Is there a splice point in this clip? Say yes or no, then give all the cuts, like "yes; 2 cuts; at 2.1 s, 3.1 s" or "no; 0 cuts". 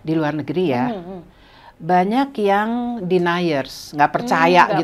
no; 0 cuts